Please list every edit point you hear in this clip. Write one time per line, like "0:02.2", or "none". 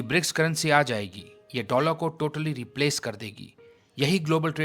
none